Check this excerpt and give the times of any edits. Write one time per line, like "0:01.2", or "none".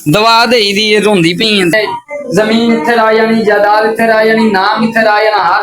0:01.7